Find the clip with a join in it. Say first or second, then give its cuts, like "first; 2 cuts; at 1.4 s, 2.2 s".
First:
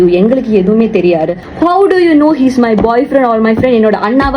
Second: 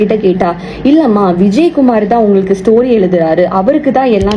first; 1 cut; at 1.4 s